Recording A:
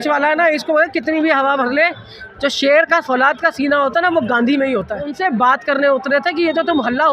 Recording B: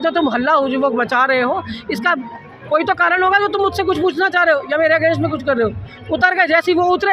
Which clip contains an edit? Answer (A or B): A